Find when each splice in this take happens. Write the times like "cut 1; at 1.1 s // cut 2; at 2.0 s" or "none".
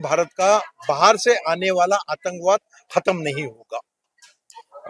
none

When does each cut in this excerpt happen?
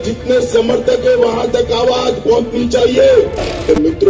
none

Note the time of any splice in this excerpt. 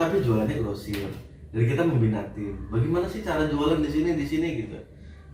none

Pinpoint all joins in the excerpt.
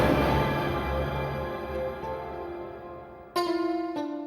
none

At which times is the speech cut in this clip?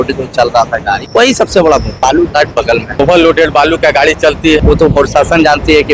cut 1; at 1.0 s // cut 2; at 1.9 s // cut 3; at 2.9 s // cut 4; at 4.6 s

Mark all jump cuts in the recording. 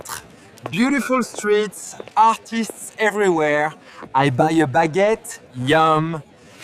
none

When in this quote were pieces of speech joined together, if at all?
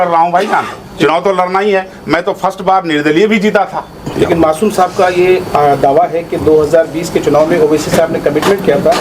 cut 1; at 4.0 s

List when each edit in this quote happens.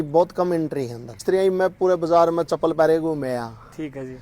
cut 1; at 1.2 s

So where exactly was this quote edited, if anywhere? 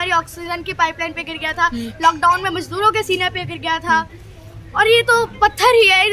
none

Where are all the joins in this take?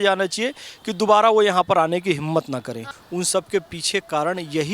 cut 1; at 2.9 s

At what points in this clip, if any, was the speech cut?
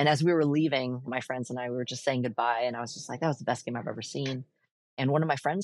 cut 1; at 1.1 s

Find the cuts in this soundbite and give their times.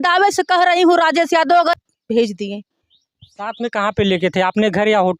cut 1; at 1.7 s

